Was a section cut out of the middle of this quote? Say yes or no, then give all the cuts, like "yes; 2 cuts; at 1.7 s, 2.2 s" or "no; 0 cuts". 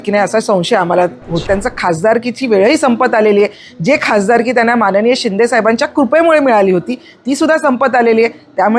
yes; 1 cut; at 1.4 s